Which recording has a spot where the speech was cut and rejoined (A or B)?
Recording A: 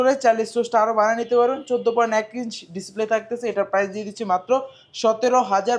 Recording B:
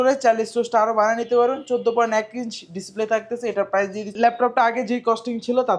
B